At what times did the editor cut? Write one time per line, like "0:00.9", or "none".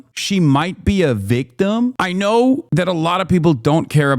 0:02.0
0:02.7